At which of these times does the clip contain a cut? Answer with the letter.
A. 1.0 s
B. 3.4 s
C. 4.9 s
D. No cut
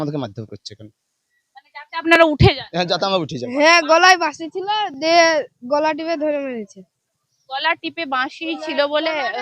B